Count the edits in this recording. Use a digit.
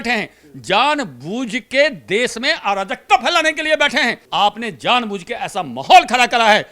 1